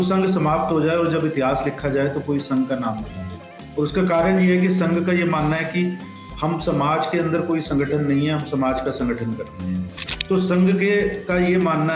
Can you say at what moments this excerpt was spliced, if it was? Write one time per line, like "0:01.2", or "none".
0:10.0